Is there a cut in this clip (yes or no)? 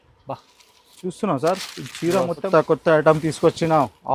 yes